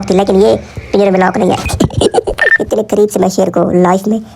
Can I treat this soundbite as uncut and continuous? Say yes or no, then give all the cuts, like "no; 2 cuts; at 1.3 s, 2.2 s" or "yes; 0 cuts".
no; 1 cut; at 2.4 s